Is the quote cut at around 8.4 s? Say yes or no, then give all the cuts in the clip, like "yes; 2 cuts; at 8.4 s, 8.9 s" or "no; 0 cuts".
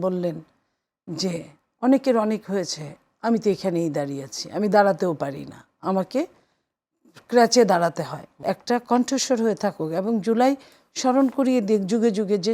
yes; 1 cut; at 8.4 s